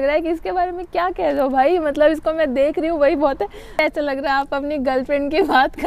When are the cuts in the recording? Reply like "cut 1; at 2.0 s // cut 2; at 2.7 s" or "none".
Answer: cut 1; at 3.8 s

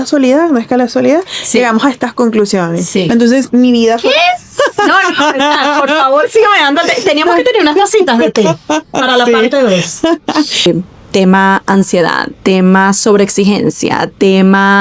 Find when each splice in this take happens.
cut 1; at 3.1 s // cut 2; at 10.7 s

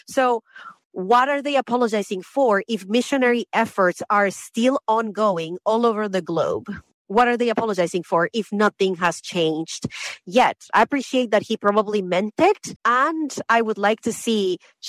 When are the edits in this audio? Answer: cut 1; at 12.7 s

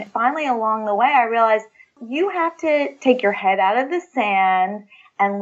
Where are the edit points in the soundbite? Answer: cut 1; at 2.0 s

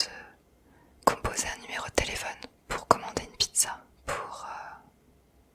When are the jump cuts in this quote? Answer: cut 1; at 2.5 s // cut 2; at 3.9 s

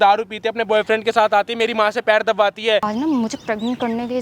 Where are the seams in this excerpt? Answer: cut 1; at 2.8 s

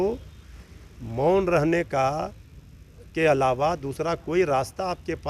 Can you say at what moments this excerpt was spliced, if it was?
none

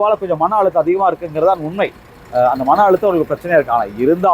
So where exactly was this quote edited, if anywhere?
none

